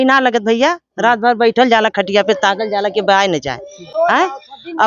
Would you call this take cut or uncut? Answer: uncut